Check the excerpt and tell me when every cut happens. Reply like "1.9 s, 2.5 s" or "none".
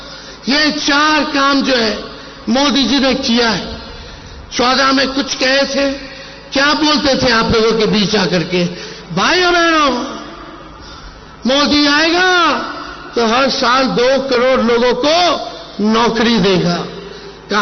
none